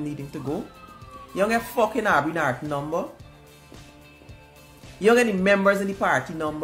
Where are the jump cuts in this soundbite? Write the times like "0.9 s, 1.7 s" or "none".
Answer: none

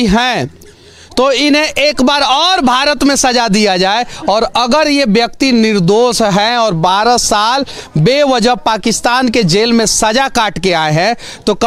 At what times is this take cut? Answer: none

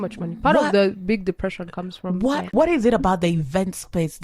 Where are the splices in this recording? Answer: 2.5 s

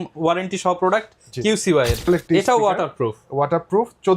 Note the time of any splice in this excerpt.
2.0 s

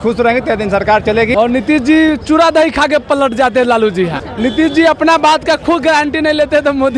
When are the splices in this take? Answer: 1.3 s, 4.2 s

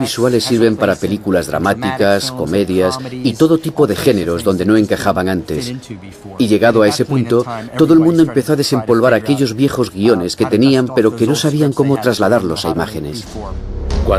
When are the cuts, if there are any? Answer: 6.1 s

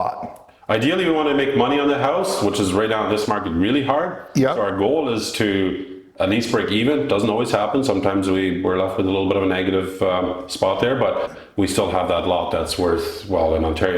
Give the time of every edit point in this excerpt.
none

